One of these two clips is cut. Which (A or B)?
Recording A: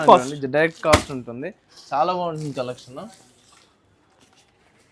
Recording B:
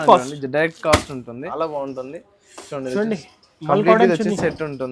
B